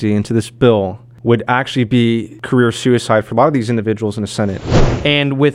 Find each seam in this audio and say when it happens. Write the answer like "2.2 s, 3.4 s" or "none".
1.0 s, 2.3 s, 4.6 s

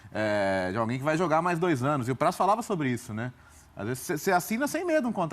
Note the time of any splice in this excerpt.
2.8 s

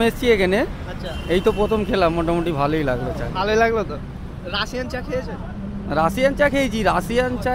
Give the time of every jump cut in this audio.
none

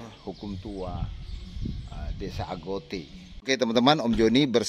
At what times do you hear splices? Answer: 3.4 s

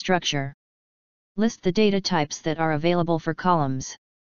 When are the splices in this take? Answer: 2.4 s

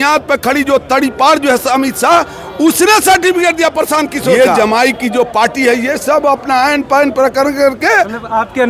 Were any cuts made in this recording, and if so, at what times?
4.4 s

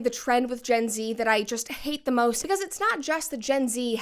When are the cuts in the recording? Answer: 2.4 s

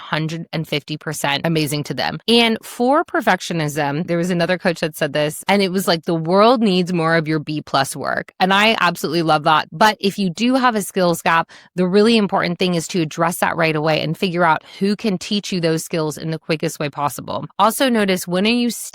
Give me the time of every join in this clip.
2.2 s, 9.7 s, 17.5 s

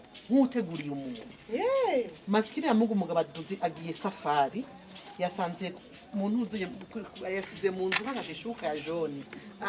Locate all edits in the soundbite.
2.2 s

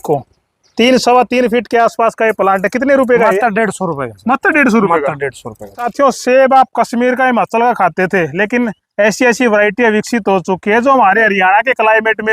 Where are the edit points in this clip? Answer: 5.9 s

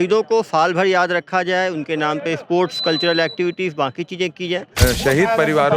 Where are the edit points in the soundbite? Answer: 4.8 s

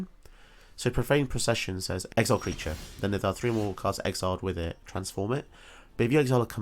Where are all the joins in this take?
2.0 s

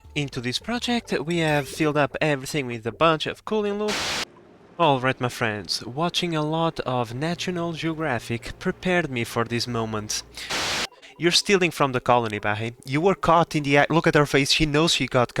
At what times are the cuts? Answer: 4.0 s, 10.5 s

